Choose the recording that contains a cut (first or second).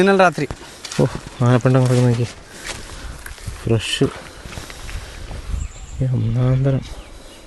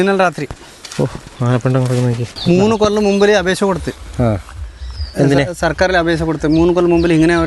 second